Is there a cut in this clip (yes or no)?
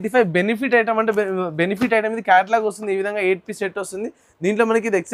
no